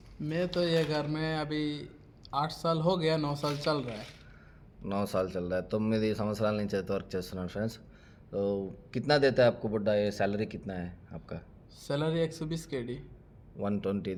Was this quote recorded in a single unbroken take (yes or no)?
yes